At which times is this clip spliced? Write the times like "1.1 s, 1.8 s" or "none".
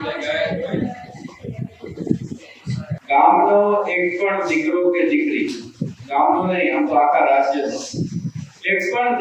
3.0 s